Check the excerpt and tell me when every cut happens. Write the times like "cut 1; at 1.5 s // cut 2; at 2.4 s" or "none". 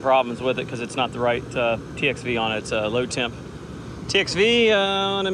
none